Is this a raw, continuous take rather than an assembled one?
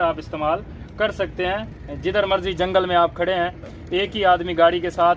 yes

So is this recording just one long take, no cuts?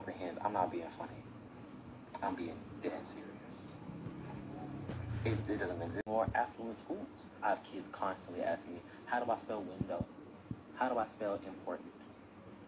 yes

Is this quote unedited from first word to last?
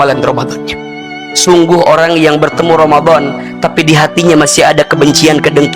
no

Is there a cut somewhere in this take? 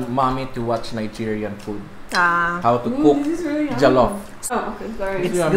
yes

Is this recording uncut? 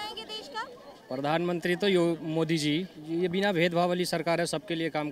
no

